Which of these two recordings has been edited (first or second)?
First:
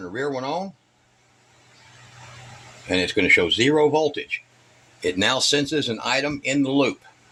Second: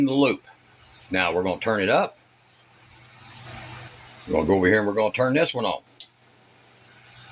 second